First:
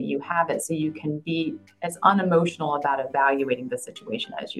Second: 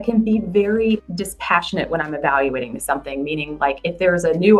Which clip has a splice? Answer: second; 1 cut; at 1.1 s

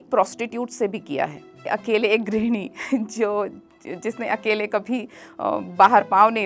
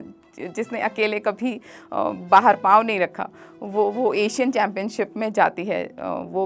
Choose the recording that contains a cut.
first; 1 cut; at 1.7 s

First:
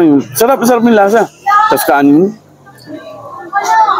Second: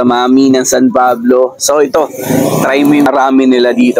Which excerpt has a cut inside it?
second; 1 cut; at 3.1 s

